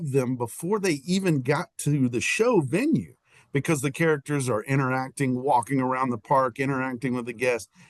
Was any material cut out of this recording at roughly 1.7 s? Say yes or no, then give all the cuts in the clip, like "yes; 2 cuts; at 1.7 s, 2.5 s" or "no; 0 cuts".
no; 0 cuts